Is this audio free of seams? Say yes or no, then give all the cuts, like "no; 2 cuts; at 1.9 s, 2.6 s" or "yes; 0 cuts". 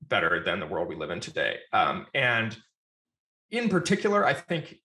yes; 0 cuts